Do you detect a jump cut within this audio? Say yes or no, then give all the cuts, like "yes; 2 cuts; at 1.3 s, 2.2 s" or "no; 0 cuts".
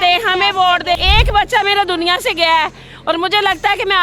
yes; 1 cut; at 1.0 s